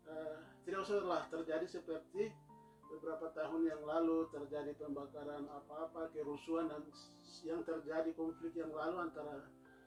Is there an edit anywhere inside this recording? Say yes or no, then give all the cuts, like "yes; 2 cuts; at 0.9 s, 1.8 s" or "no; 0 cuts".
no; 0 cuts